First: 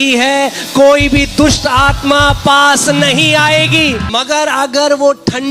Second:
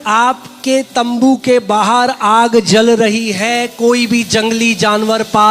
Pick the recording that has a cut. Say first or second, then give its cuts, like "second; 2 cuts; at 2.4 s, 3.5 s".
first; 1 cut; at 4.0 s